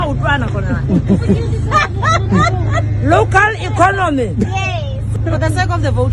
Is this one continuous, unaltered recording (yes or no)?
no